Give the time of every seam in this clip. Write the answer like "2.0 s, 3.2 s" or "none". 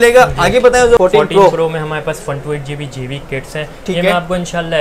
1.0 s